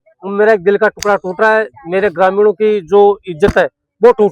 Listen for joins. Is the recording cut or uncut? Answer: uncut